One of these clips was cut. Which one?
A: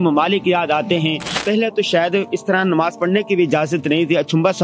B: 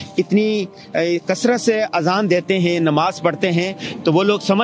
A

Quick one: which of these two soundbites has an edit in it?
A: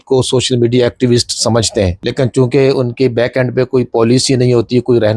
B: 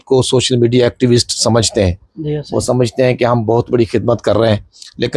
A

